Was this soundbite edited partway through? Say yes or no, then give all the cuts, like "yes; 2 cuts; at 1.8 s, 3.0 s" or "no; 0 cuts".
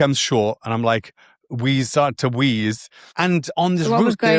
yes; 1 cut; at 3.2 s